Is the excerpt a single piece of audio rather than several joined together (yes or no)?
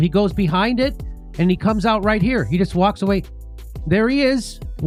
yes